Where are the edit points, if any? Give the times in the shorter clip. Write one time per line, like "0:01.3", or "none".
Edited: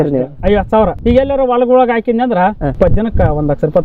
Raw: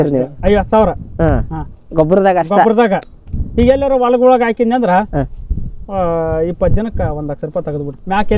0:01.0
0:02.8